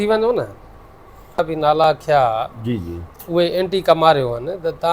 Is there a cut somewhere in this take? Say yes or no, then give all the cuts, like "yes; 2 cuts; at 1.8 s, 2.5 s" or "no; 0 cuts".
yes; 1 cut; at 1.4 s